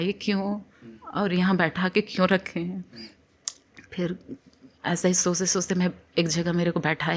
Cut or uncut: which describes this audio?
uncut